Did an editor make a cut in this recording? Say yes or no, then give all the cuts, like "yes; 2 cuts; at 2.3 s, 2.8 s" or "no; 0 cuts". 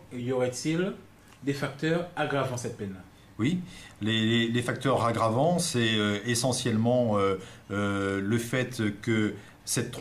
yes; 1 cut; at 8.7 s